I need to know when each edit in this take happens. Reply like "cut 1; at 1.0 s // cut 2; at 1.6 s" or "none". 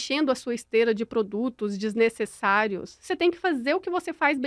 none